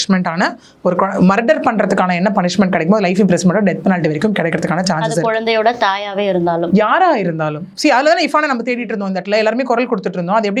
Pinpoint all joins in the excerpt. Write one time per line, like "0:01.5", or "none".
none